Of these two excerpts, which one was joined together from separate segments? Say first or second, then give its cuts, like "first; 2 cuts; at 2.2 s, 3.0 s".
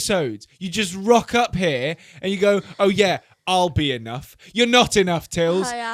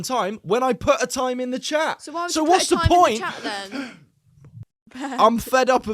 second; 1 cut; at 4.8 s